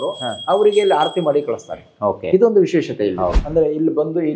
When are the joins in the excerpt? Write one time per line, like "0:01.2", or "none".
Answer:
0:03.4